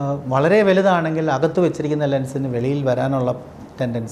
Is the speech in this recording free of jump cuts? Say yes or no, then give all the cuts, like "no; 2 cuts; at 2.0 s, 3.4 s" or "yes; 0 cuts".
yes; 0 cuts